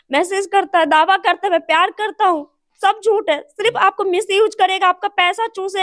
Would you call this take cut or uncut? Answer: uncut